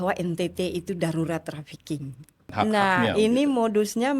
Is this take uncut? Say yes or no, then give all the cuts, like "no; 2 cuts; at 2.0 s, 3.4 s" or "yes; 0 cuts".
no; 1 cut; at 2.5 s